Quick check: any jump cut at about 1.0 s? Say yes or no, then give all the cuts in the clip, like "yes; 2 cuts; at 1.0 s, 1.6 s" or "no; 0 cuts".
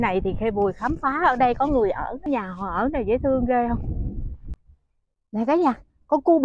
no; 2 cuts; at 2.3 s, 4.6 s